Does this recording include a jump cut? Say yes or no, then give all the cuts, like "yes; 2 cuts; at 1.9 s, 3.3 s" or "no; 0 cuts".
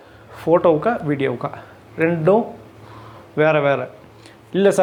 no; 0 cuts